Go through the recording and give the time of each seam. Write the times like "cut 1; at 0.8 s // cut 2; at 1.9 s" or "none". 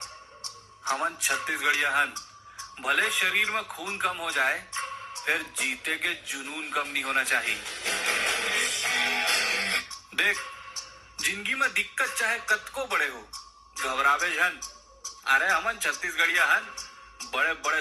none